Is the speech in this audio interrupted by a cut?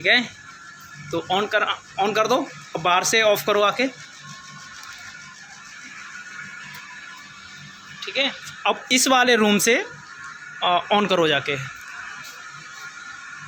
no; 0 cuts

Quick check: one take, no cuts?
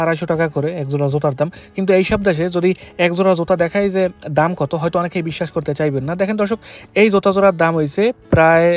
yes; 0 cuts

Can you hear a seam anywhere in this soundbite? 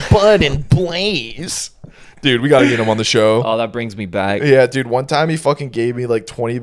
no; 0 cuts

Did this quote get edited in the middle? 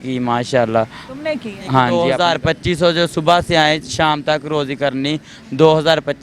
yes; 1 cut; at 1.9 s

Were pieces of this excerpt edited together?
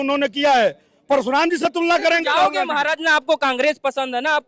no; 0 cuts

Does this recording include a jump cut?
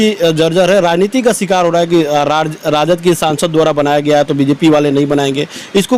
no; 0 cuts

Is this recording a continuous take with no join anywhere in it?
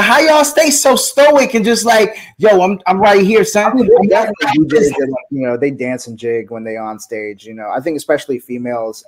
yes; 0 cuts

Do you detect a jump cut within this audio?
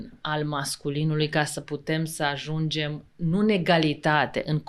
no; 0 cuts

